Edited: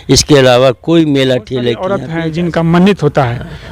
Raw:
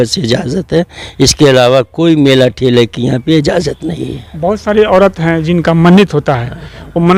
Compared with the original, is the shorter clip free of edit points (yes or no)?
no